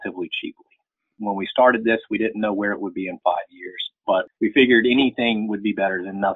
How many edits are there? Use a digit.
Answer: 1